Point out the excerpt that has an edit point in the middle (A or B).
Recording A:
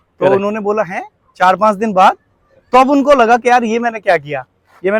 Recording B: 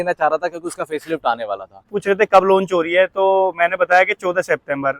B